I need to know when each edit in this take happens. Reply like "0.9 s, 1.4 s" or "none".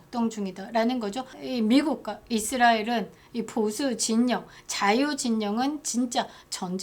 1.4 s